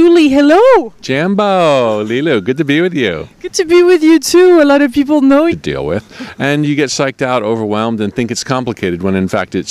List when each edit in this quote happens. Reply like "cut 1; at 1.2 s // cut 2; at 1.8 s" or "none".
none